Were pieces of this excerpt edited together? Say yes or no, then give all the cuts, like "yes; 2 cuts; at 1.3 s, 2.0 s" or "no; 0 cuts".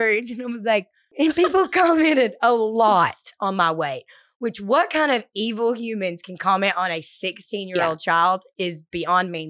yes; 1 cut; at 1.1 s